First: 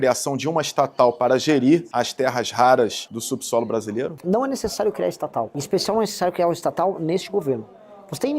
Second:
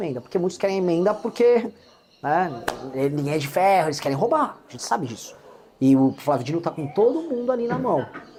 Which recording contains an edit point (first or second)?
first